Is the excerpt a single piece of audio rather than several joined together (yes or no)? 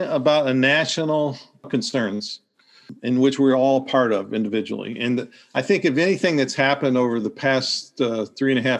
no